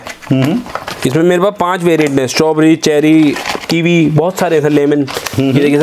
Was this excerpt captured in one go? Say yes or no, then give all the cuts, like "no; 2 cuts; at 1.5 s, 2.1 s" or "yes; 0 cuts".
yes; 0 cuts